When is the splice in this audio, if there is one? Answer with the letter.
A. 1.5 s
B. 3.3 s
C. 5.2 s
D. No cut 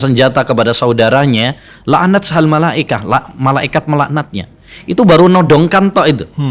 D